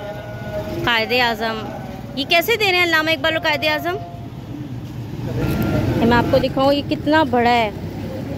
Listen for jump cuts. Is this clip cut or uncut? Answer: cut